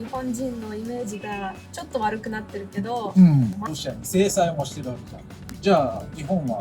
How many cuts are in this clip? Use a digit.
1